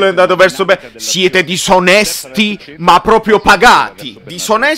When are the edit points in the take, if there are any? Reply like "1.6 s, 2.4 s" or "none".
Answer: none